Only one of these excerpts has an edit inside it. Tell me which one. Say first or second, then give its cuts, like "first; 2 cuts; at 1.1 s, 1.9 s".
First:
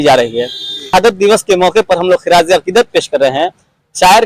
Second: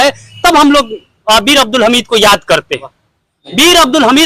first; 1 cut; at 0.9 s